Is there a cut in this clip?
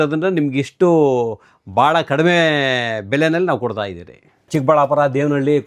yes; 1 cut; at 4.5 s

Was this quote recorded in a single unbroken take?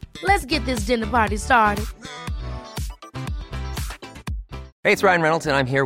no; 1 cut; at 4.7 s

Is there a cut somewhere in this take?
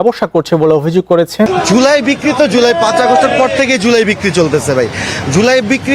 yes; 1 cut; at 1.5 s

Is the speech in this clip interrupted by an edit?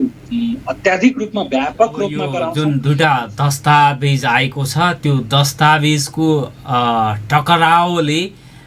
yes; 1 cut; at 2.5 s

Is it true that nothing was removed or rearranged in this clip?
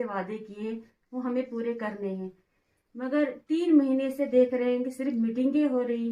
yes; 0 cuts

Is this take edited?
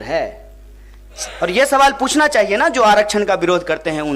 yes; 1 cut; at 1.1 s

